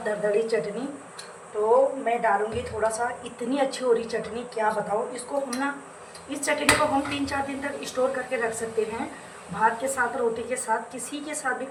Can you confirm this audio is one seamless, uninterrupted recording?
yes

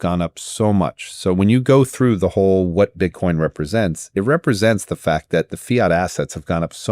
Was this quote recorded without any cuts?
yes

